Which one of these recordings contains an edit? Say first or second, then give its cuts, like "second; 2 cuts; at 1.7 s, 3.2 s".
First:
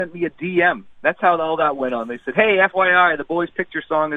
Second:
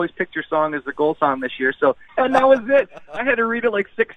second; 1 cut; at 2.0 s